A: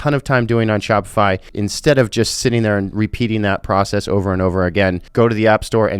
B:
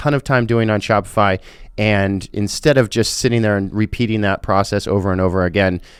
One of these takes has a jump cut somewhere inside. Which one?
A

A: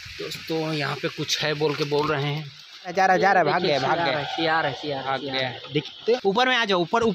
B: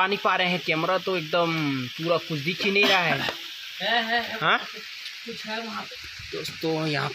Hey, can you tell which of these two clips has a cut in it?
A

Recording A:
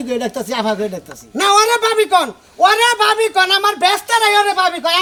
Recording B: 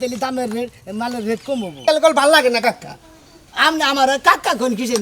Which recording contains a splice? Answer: B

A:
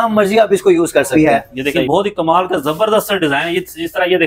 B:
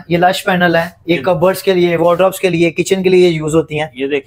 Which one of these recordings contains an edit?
A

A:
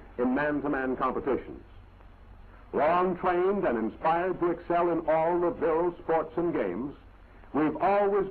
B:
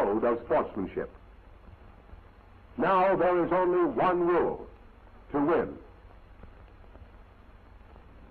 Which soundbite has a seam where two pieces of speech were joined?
B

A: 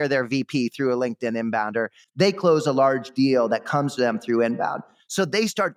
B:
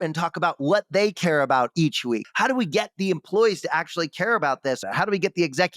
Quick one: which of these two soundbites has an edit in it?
B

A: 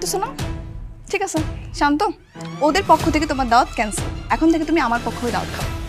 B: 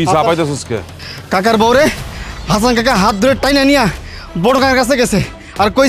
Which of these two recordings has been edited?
B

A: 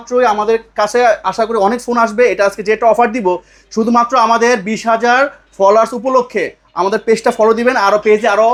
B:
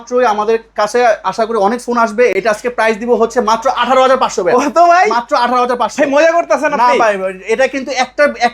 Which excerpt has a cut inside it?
B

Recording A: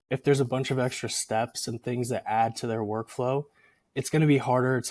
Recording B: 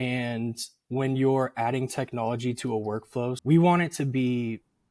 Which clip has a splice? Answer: B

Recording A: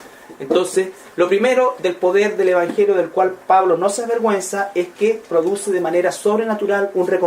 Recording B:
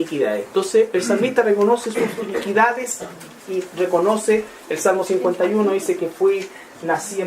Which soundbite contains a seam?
B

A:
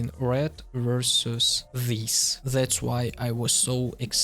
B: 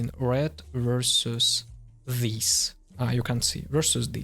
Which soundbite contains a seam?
A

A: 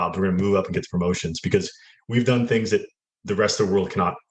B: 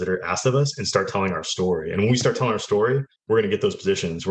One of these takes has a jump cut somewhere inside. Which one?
B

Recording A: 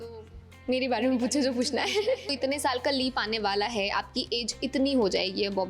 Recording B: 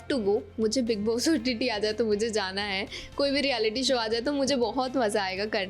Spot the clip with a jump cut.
A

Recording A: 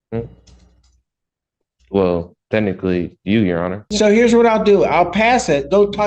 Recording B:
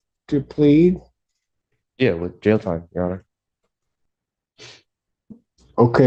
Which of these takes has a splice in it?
A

